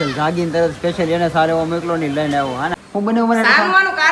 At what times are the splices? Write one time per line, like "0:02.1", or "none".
0:02.7

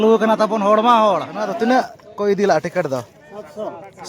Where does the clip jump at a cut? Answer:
0:01.4

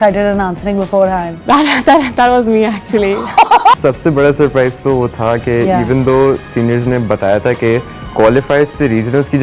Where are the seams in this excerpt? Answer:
0:03.7

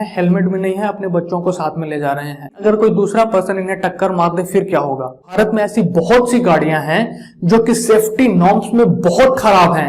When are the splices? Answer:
0:02.6
0:05.3

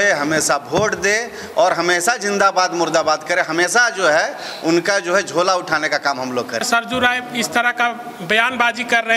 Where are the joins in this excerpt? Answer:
0:06.6

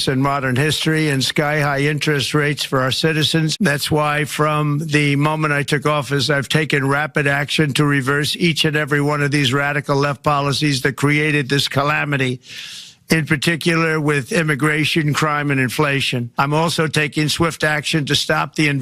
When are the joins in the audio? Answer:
0:03.5
0:16.3

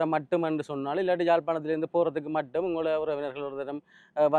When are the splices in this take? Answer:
none

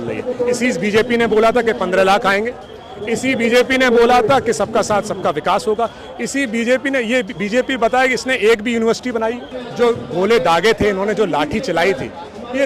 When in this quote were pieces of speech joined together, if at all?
0:09.6

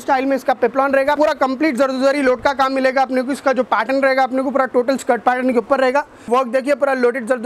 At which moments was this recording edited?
0:01.2
0:06.3

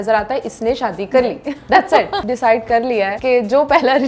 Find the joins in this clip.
0:02.2
0:03.2

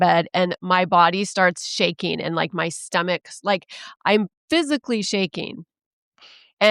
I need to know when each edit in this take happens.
none

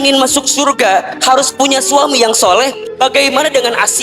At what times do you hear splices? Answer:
0:02.8

